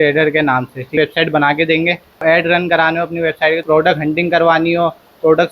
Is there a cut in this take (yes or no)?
yes